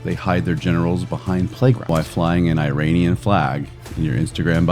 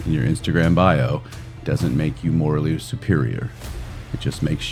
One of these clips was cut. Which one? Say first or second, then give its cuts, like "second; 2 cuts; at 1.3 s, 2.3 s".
first; 1 cut; at 1.9 s